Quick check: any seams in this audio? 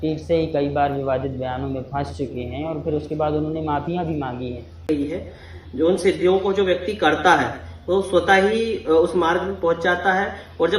yes; 1 cut; at 4.9 s

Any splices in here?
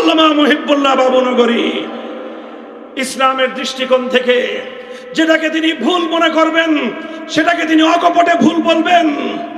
no; 0 cuts

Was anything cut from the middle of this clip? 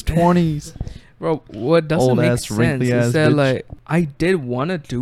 yes; 1 cut; at 3.7 s

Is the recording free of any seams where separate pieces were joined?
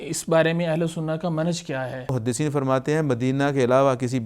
no; 1 cut; at 2.1 s

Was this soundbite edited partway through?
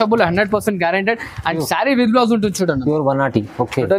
no; 0 cuts

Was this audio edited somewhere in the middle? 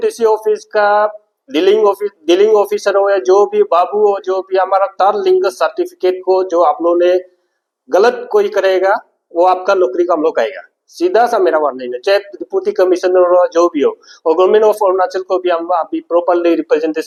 no; 0 cuts

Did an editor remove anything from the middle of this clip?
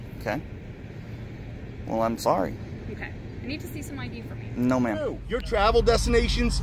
yes; 1 cut; at 5.3 s

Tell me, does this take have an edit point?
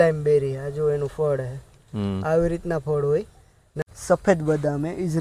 yes; 1 cut; at 3.7 s

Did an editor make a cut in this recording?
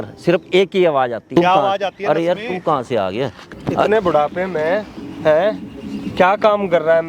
yes; 2 cuts; at 1.2 s, 3.5 s

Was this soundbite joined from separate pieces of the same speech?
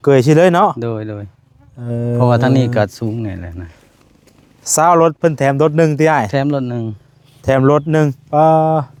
no; 0 cuts

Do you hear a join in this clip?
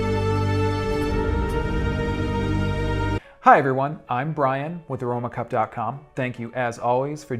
yes; 1 cut; at 3.0 s

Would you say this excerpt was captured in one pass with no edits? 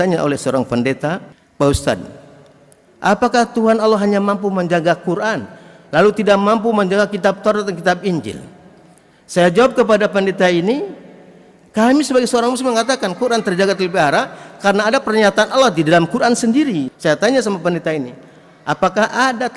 no; 2 cuts; at 1.4 s, 16.9 s

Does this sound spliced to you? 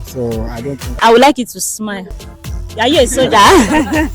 yes; 1 cut; at 1.0 s

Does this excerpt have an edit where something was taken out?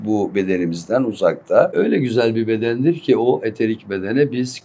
yes; 1 cut; at 1.7 s

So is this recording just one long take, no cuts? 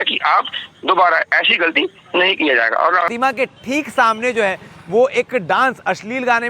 no; 1 cut; at 3.1 s

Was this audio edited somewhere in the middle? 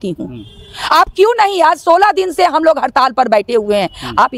no; 0 cuts

